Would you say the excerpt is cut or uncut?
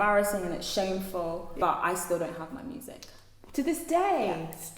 cut